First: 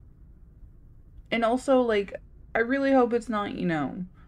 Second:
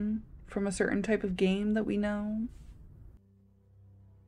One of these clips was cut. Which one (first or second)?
second